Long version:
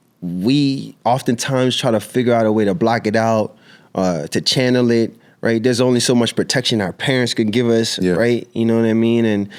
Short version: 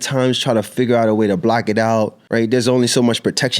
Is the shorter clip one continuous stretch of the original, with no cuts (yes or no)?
no